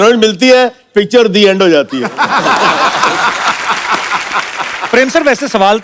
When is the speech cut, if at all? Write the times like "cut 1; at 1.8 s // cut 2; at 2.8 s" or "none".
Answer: cut 1; at 4.9 s